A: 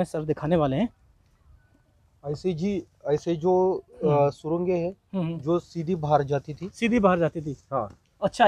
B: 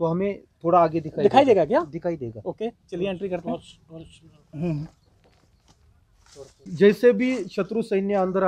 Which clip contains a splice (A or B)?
B